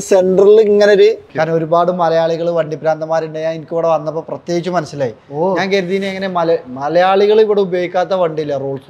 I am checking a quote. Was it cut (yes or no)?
yes